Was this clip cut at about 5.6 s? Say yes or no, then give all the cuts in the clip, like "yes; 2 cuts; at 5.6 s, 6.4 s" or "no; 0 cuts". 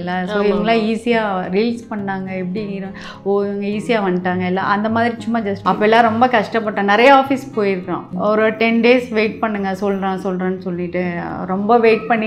yes; 2 cuts; at 5.6 s, 8.0 s